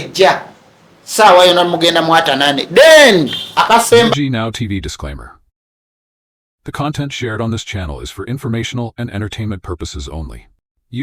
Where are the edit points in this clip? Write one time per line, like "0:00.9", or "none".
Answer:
0:04.1